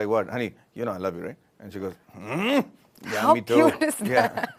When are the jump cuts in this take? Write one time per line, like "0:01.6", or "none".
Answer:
none